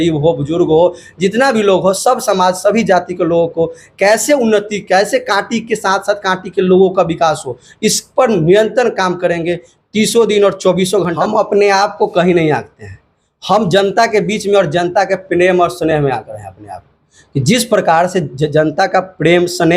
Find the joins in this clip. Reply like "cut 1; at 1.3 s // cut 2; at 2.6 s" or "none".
cut 1; at 11.2 s